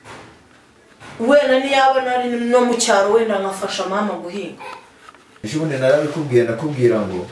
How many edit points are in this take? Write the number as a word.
one